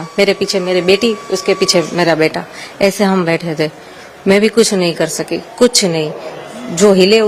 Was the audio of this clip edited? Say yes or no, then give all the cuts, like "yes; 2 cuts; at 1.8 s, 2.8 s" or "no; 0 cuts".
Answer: no; 0 cuts